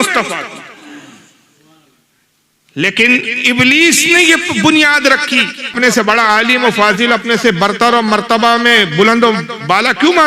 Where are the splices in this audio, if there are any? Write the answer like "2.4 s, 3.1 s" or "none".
5.7 s